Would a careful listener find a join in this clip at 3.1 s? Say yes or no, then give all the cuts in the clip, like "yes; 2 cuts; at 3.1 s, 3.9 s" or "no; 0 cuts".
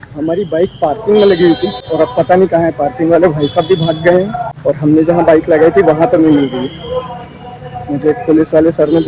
no; 2 cuts; at 1.8 s, 4.5 s